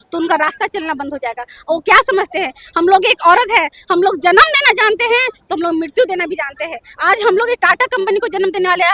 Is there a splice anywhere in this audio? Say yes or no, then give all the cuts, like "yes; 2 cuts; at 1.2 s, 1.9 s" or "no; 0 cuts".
no; 0 cuts